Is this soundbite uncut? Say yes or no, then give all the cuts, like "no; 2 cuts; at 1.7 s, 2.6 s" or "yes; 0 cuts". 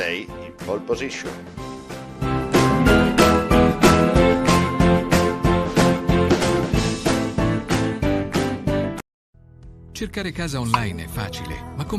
no; 1 cut; at 9.0 s